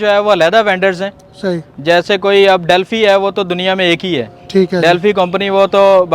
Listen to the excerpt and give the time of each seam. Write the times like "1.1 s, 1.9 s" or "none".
none